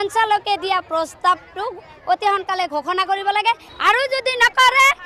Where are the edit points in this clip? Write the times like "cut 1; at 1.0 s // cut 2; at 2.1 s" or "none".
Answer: none